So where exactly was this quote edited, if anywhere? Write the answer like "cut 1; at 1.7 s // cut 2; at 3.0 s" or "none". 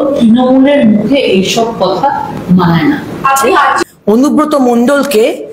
cut 1; at 3.8 s